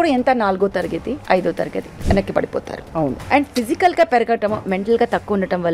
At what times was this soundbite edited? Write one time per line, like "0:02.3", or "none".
0:01.2
0:01.9
0:03.2